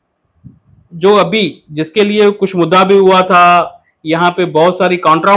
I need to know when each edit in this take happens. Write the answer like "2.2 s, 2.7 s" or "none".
none